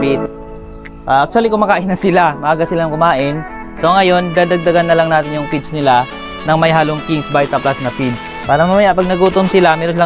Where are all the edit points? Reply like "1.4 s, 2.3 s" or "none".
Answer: 8.3 s

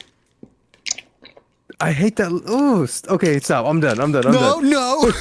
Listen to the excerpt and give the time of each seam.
none

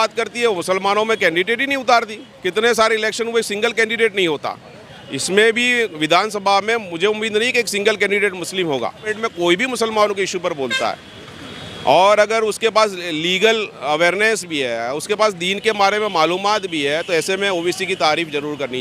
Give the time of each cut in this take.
9.1 s

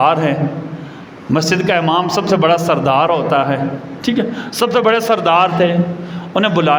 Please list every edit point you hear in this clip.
none

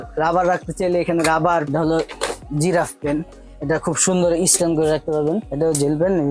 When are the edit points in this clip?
1.7 s, 5.5 s

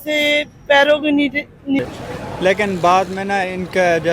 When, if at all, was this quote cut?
1.8 s

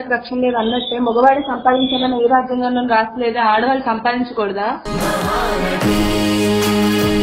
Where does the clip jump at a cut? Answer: none

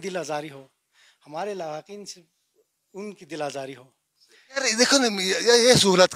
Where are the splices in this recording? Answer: 4.6 s

